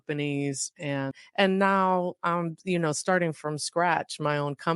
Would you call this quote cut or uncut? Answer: cut